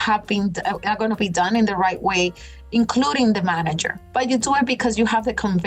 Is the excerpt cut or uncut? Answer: cut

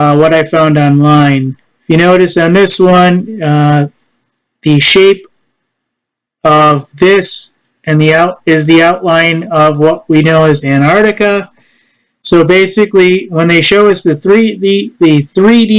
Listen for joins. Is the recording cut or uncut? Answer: cut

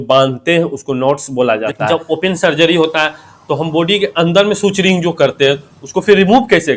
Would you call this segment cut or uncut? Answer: cut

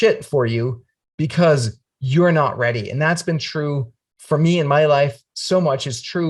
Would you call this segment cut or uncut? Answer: uncut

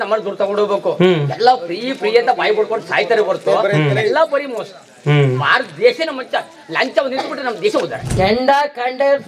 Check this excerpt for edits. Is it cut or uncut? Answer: cut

